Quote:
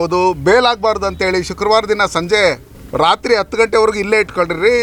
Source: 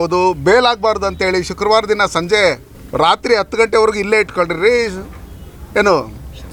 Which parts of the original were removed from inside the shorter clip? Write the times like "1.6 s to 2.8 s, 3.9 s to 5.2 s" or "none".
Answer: none